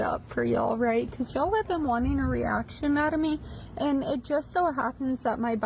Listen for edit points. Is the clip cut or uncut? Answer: cut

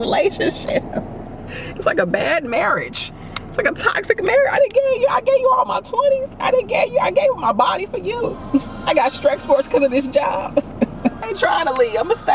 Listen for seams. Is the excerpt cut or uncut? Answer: cut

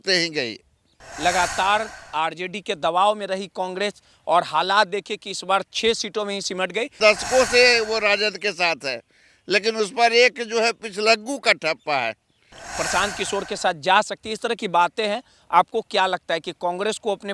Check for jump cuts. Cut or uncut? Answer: cut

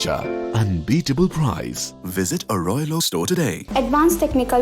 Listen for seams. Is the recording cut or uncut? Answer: cut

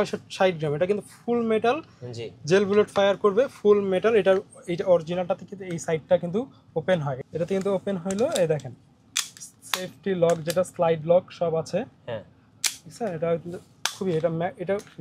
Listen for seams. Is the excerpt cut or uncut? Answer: cut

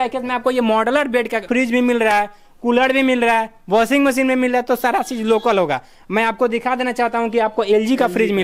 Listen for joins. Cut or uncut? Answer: cut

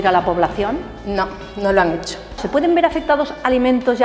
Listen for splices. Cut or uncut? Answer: cut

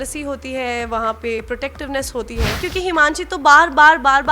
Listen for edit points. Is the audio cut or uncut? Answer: cut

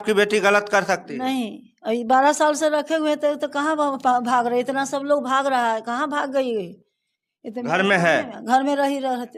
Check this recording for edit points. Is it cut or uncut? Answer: uncut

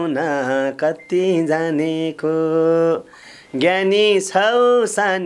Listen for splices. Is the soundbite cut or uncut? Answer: uncut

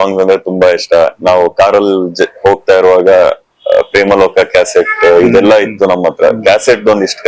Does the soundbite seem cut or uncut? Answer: uncut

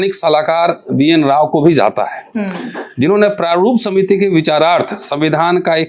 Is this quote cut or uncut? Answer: uncut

